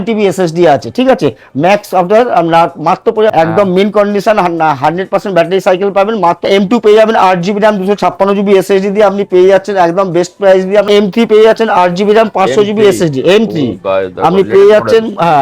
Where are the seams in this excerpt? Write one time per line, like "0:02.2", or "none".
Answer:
0:03.3
0:06.5
0:10.9